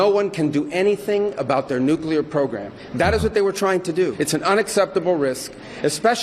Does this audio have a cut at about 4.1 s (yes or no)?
yes